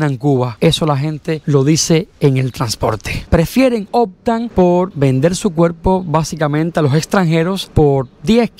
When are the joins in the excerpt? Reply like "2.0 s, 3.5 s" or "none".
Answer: 3.3 s